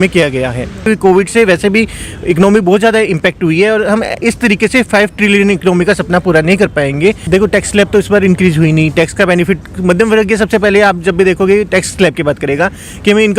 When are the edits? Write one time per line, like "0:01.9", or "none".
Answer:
0:00.8
0:07.2

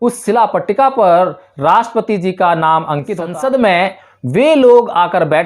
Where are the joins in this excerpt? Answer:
0:03.2

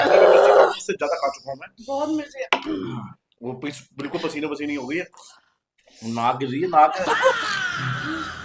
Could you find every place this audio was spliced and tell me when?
none

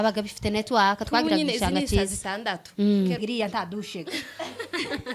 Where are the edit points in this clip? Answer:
0:03.2

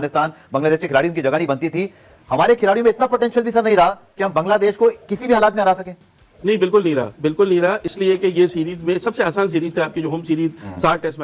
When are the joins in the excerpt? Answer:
none

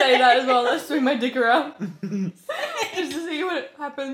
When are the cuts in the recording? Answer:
none

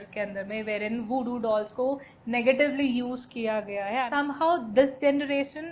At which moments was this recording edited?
0:04.1

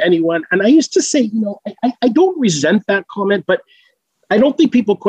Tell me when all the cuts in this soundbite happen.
none

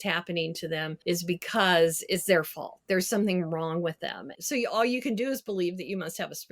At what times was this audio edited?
0:00.9
0:04.3

